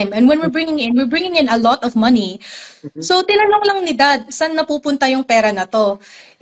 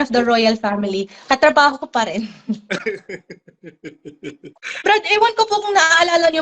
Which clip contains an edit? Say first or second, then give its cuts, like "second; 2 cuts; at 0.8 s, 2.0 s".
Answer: second; 1 cut; at 4.8 s